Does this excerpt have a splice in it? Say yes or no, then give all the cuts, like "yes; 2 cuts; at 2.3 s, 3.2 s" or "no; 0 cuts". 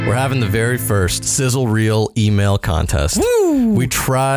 yes; 1 cut; at 1.2 s